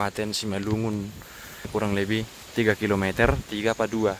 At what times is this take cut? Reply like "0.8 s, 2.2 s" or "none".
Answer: 1.7 s

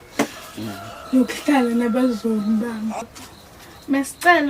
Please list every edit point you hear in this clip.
3.0 s

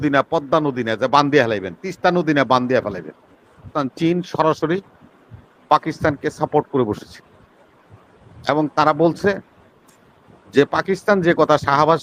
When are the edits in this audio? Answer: 3.8 s

